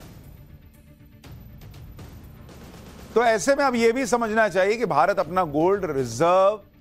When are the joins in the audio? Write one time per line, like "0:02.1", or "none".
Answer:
none